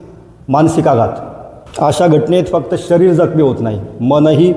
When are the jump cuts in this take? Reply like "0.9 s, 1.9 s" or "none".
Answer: none